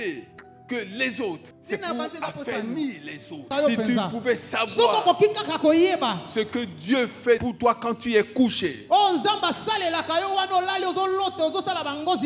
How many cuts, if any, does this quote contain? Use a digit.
2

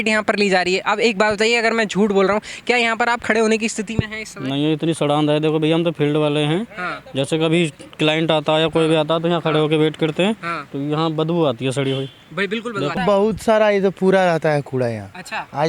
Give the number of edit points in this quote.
1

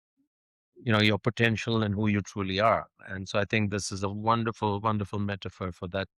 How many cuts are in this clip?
0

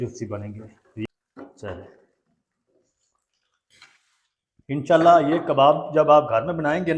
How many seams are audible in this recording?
1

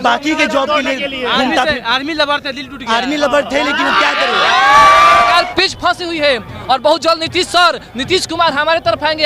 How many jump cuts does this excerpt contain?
1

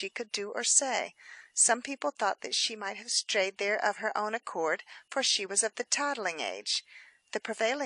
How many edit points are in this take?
1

